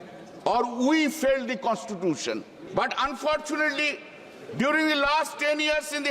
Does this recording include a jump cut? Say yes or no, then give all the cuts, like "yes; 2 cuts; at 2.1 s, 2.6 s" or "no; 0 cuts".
yes; 1 cut; at 2.6 s